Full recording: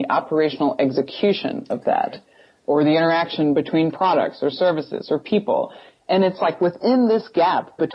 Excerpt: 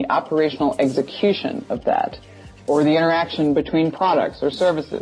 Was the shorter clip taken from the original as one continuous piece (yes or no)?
yes